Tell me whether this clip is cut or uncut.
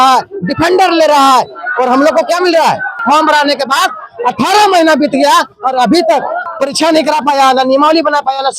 cut